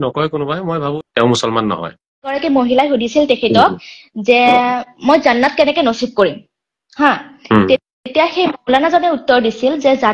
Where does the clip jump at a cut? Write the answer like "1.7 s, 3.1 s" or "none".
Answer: 0.9 s, 2.4 s